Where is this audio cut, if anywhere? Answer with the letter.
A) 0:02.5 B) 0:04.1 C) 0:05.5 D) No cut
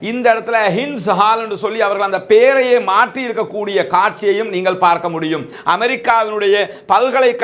C